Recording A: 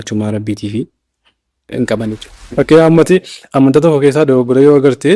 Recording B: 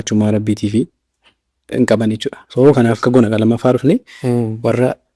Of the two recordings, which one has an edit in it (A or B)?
A